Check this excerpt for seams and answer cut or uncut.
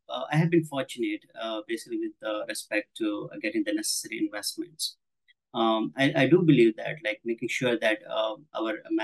uncut